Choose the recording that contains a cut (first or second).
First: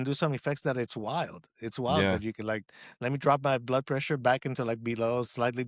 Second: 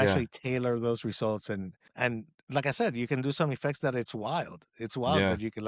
second